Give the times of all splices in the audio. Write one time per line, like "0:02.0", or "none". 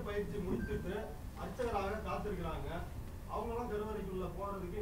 none